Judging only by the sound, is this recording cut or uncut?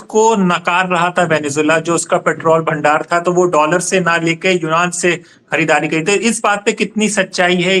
uncut